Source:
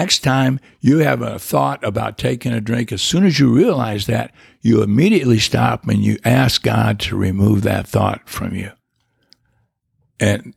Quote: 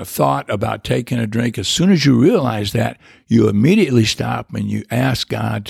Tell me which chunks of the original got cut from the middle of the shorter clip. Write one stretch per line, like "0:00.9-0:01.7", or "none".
none